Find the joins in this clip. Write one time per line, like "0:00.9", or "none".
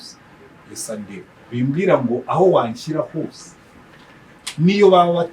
0:01.4